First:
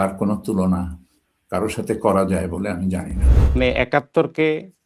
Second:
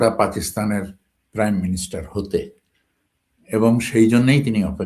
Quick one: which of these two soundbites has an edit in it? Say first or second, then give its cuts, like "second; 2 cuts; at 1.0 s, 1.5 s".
first; 1 cut; at 3.5 s